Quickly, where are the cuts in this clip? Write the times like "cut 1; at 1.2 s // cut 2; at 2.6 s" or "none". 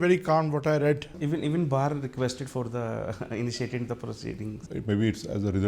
cut 1; at 1.1 s // cut 2; at 4.6 s